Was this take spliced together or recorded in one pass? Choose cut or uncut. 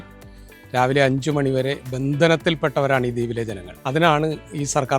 cut